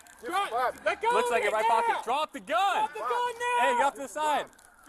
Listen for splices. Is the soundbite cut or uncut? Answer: uncut